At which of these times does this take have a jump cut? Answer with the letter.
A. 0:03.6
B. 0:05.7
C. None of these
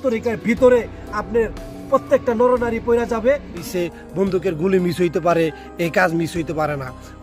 A